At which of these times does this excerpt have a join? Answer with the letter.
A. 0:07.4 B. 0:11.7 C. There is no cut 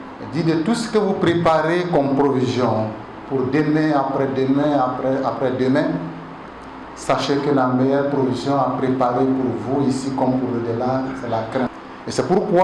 B